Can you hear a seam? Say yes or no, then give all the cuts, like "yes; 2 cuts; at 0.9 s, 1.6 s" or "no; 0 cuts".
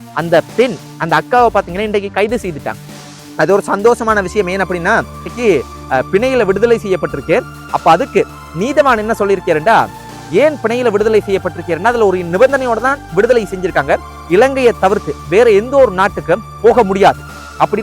yes; 1 cut; at 5.4 s